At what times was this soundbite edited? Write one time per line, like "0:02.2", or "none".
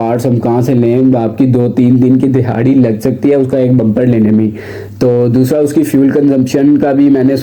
none